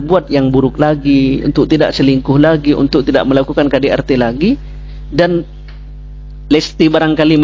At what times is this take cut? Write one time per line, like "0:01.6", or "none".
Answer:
none